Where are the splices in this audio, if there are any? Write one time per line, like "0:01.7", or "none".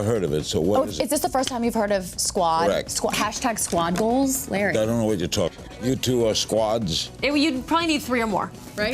0:05.7